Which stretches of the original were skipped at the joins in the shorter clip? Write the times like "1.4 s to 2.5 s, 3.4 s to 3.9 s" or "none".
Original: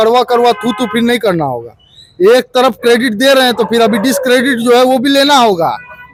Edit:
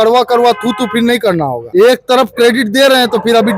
1.6 s to 2.0 s